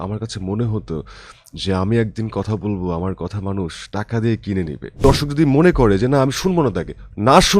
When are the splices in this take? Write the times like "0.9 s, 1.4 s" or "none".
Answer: 4.9 s